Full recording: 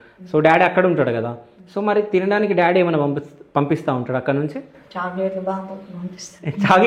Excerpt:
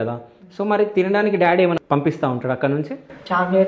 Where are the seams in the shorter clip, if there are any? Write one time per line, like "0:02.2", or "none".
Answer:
0:01.8